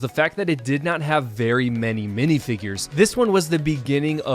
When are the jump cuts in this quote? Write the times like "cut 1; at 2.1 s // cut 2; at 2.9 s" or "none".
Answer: cut 1; at 2.9 s

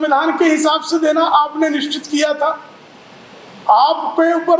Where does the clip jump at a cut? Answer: none

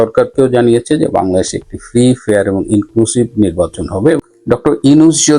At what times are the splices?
cut 1; at 4.2 s

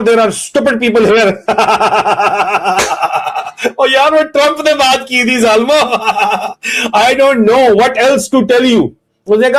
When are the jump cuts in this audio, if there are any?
none

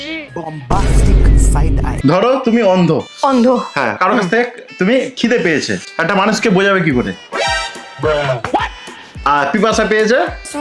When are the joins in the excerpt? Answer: cut 1; at 1.9 s // cut 2; at 4.0 s

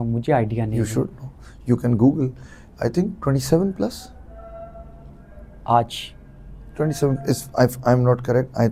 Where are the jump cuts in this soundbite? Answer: none

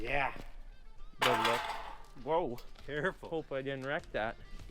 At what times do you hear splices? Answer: cut 1; at 1.1 s

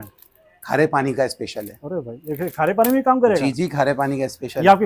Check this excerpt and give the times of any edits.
none

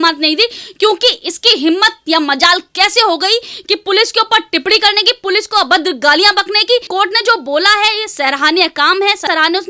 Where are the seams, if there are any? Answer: cut 1; at 6.9 s

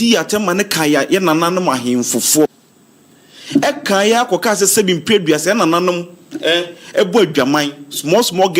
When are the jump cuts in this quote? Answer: cut 1; at 1.0 s // cut 2; at 2.5 s

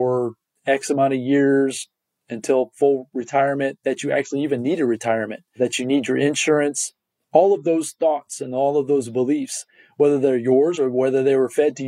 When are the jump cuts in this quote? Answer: cut 1; at 3.1 s // cut 2; at 5.6 s

